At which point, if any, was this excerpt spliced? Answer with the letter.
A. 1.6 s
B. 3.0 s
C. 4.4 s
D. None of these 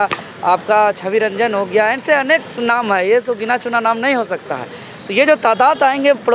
D